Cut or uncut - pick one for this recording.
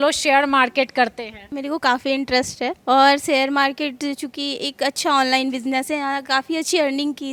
uncut